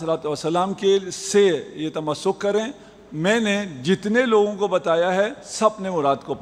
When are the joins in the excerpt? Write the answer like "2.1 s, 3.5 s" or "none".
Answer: none